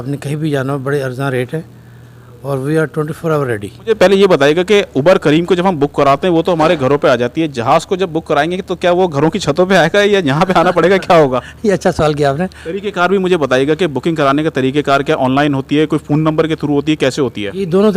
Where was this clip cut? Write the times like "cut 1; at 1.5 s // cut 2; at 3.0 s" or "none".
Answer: cut 1; at 3.9 s // cut 2; at 12.6 s

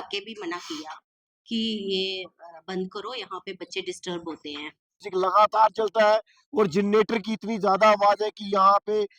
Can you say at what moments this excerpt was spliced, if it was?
cut 1; at 5.0 s

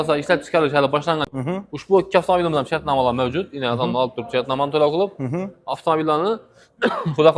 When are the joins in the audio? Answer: cut 1; at 1.3 s

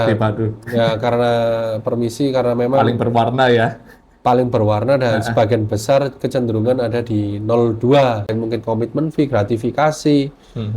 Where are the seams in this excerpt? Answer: cut 1; at 8.3 s

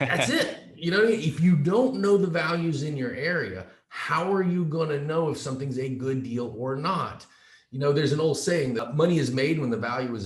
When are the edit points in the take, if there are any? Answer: cut 1; at 8.8 s

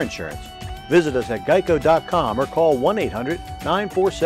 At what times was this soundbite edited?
none

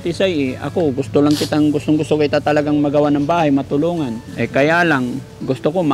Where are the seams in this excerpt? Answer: cut 1; at 4.2 s

